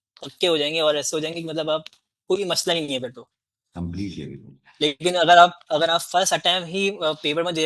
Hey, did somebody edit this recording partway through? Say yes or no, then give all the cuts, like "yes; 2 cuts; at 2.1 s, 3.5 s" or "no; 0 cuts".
no; 0 cuts